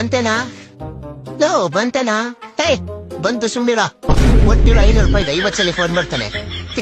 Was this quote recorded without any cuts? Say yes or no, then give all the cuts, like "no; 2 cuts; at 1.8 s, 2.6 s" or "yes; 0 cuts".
yes; 0 cuts